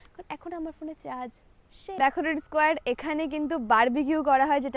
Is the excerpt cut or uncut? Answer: cut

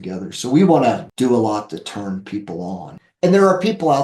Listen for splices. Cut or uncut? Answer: cut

